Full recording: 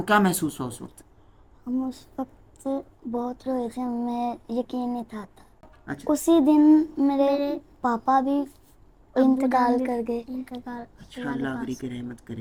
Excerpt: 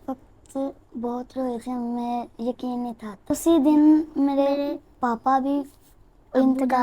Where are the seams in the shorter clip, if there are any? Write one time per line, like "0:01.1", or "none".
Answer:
0:03.3